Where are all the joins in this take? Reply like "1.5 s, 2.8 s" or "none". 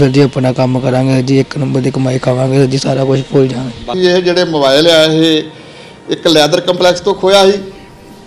3.9 s